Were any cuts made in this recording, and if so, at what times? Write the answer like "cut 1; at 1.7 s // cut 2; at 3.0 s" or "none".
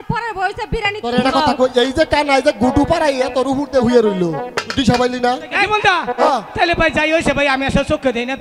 cut 1; at 1.1 s // cut 2; at 5.6 s